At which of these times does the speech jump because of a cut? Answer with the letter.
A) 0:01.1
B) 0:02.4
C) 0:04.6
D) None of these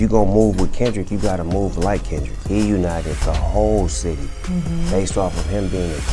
B